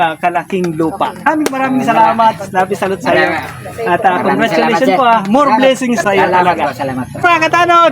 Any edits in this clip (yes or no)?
yes